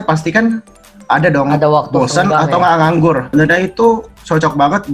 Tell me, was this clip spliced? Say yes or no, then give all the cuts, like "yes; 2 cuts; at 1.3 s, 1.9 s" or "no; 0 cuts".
yes; 1 cut; at 3.3 s